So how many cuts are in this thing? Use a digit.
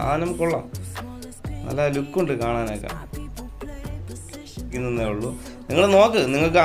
1